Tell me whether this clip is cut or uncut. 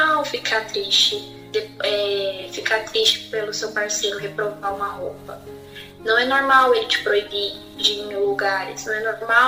uncut